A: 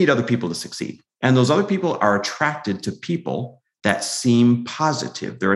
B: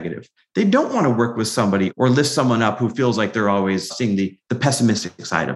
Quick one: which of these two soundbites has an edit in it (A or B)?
B